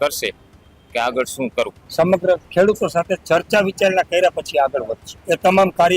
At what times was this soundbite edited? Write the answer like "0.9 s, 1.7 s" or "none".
1.8 s, 5.1 s

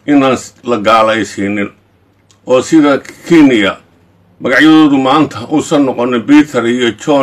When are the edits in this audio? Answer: none

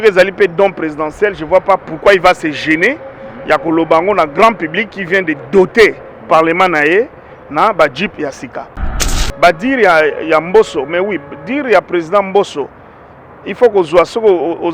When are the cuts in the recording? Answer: 9.0 s

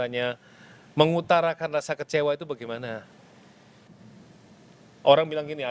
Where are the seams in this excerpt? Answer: none

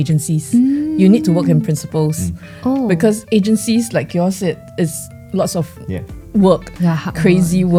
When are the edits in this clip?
none

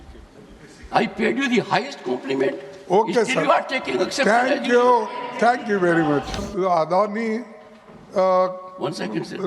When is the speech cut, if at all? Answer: 6.5 s

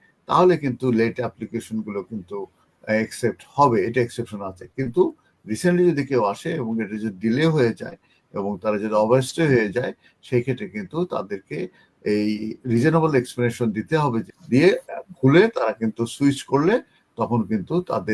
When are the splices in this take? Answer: 14.3 s

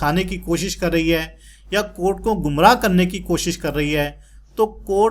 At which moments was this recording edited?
none

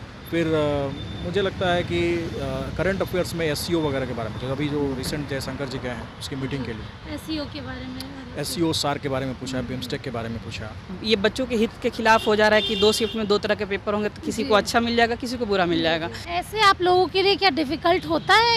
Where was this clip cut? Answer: 11.0 s, 16.2 s

